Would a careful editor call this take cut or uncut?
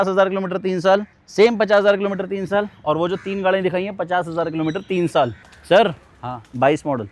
cut